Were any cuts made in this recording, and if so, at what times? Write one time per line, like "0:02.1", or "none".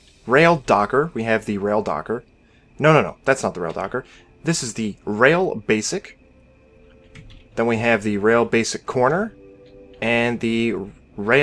0:04.3